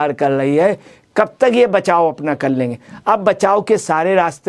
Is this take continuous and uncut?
yes; 0 cuts

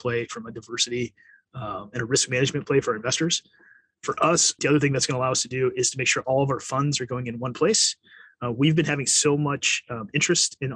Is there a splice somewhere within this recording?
yes; 1 cut; at 4.5 s

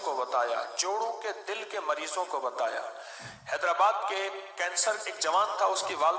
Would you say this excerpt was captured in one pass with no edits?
yes; 0 cuts

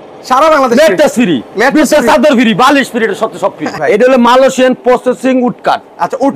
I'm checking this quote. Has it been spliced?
yes; 1 cut; at 3.8 s

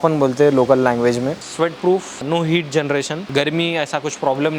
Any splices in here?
yes; 3 cuts; at 1.5 s, 2.2 s, 3.2 s

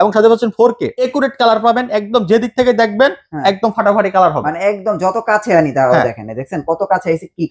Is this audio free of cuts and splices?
no; 1 cut; at 1.0 s

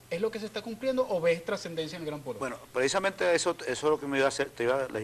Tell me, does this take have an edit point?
no; 0 cuts

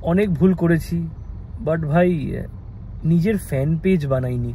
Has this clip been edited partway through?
no; 0 cuts

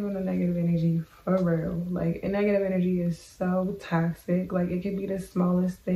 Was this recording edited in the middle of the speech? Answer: no; 0 cuts

